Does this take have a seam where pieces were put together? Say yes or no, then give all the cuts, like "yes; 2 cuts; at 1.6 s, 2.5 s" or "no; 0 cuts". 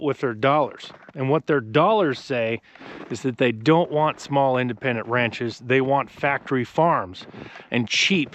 no; 0 cuts